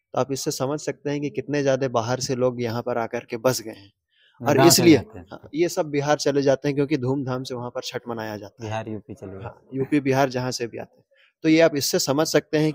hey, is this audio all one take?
yes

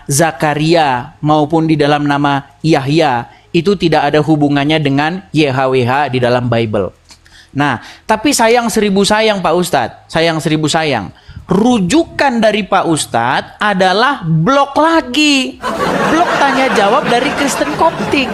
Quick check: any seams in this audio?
no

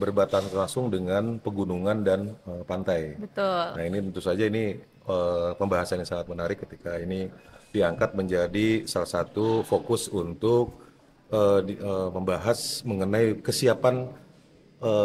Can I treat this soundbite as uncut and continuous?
yes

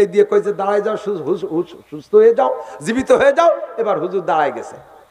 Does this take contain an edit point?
no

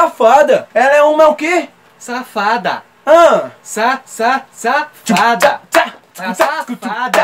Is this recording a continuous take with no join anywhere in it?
yes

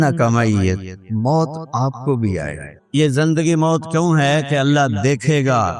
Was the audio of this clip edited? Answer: yes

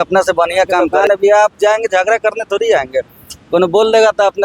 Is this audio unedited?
no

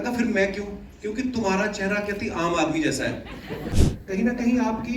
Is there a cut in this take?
yes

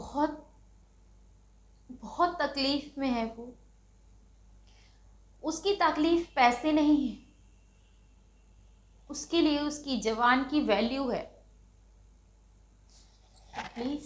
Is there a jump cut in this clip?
no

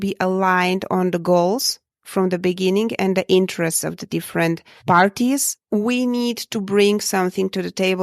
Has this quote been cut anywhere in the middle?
yes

